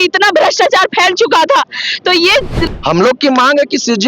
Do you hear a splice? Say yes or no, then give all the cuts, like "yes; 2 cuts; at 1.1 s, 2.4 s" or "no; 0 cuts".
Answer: yes; 1 cut; at 2.6 s